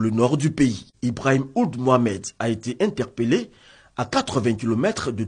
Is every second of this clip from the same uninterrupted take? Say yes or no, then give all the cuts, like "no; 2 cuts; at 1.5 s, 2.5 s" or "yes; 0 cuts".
no; 1 cut; at 0.9 s